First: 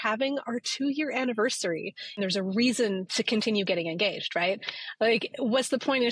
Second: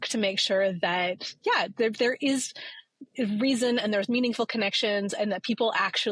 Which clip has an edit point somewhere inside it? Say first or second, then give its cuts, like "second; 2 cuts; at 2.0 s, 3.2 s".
first; 1 cut; at 2.2 s